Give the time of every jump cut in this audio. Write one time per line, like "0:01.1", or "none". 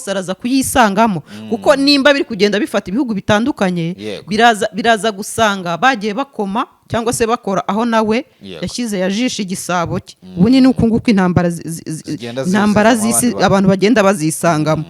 none